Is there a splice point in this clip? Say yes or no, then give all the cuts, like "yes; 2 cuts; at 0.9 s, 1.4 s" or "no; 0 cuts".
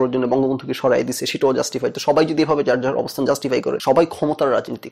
yes; 1 cut; at 3.8 s